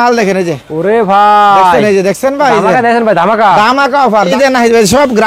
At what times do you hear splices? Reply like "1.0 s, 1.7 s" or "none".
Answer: 4.3 s